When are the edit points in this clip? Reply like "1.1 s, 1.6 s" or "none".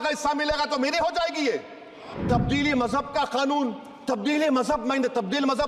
2.1 s

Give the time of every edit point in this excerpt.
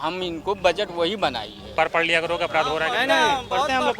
1.7 s

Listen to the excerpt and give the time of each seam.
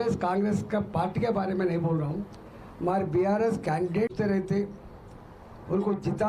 4.1 s

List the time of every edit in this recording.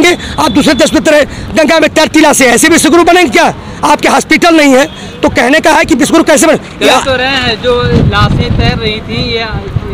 none

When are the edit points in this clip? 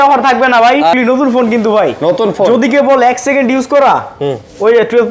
0.9 s

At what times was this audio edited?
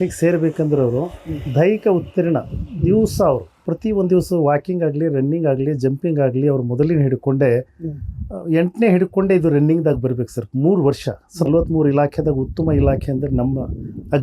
3.5 s, 11.5 s

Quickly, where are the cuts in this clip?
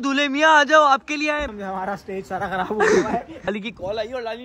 1.5 s, 3.5 s

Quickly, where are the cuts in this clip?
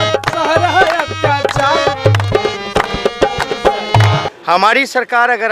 4.3 s

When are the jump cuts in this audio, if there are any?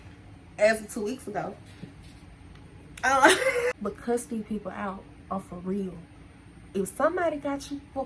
3.9 s

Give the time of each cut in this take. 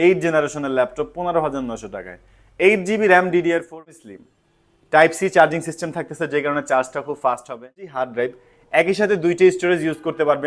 3.9 s, 7.9 s

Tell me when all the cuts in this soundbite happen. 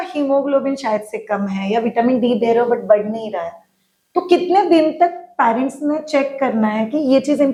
none

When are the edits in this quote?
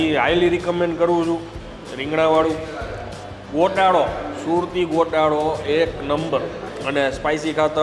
6.7 s

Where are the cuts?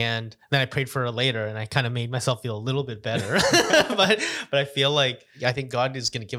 5.3 s

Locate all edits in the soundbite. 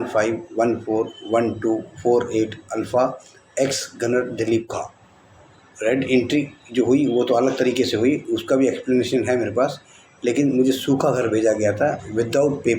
4.7 s

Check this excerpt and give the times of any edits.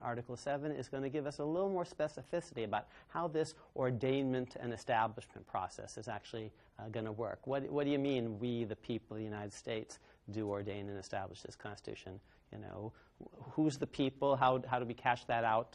9.2 s

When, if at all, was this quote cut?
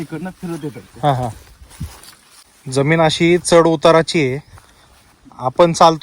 2.6 s

